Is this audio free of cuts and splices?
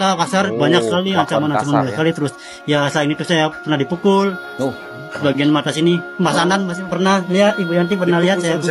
yes; 0 cuts

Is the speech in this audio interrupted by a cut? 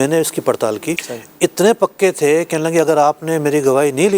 yes; 1 cut; at 1.0 s

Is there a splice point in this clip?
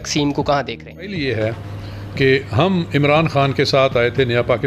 yes; 1 cut; at 1.2 s

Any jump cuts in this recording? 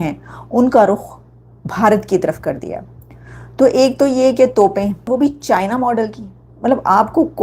yes; 1 cut; at 5.1 s

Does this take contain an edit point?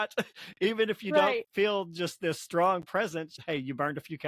yes; 1 cut; at 3.3 s

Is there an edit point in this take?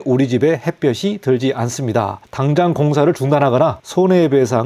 yes; 2 cuts; at 2.2 s, 3.8 s

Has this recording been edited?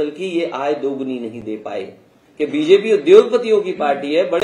yes; 1 cut; at 2.2 s

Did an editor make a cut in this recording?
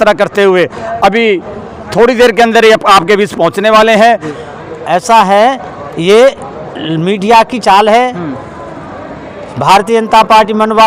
yes; 1 cut; at 4.4 s

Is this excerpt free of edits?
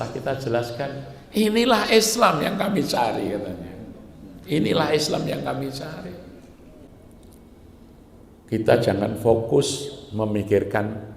no; 1 cut; at 6.9 s

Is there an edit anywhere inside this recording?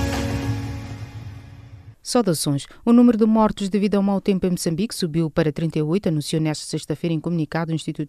yes; 1 cut; at 2.2 s

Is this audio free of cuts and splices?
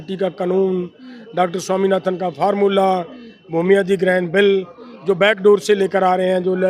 yes; 0 cuts

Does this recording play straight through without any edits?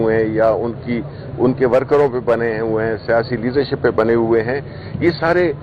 yes; 0 cuts

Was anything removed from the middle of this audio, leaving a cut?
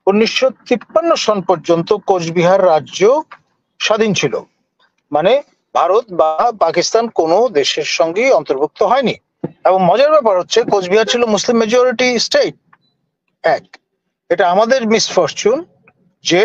no; 0 cuts

